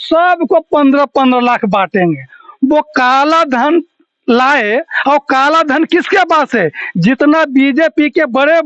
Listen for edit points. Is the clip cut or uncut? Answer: uncut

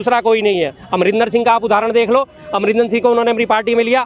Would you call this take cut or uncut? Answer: uncut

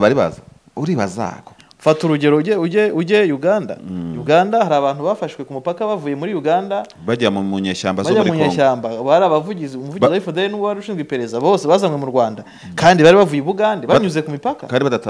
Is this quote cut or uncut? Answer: cut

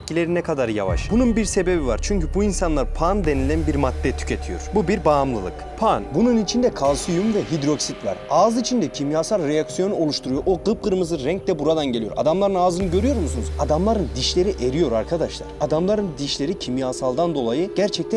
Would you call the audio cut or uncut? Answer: uncut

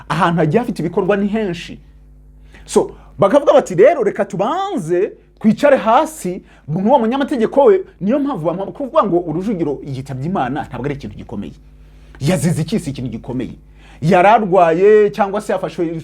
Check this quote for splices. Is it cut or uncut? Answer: uncut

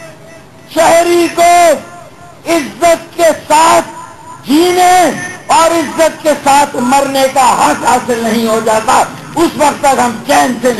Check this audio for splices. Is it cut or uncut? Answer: uncut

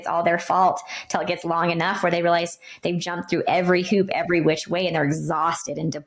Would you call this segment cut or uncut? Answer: uncut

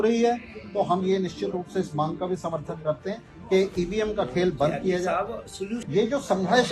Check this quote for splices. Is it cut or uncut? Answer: cut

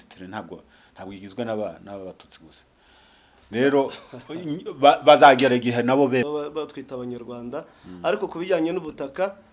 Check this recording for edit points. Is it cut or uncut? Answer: cut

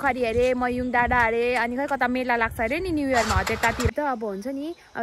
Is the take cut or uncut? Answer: cut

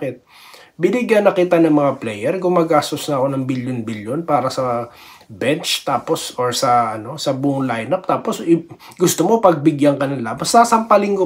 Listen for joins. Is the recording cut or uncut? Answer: uncut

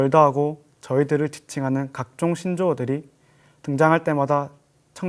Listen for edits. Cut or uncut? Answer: uncut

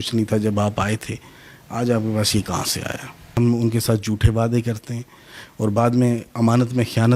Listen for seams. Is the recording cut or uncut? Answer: cut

